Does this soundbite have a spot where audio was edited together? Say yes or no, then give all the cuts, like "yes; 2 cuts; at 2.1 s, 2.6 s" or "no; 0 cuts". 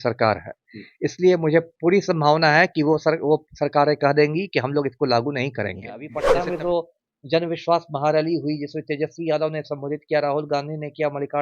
yes; 1 cut; at 6.2 s